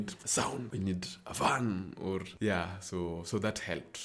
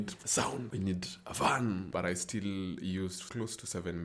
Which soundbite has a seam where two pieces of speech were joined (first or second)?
second